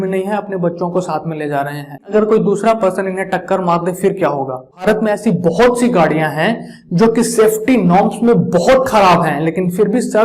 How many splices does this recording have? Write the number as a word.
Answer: two